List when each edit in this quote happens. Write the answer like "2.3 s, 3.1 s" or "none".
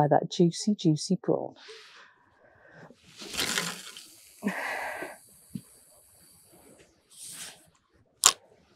2.2 s